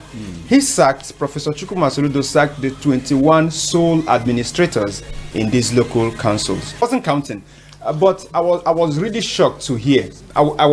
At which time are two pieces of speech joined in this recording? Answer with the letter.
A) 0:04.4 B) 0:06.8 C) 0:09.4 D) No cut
B